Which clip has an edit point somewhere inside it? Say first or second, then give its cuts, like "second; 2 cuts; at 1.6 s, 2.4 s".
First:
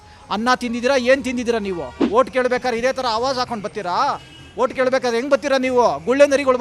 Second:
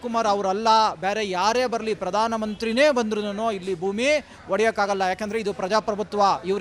first; 1 cut; at 1.9 s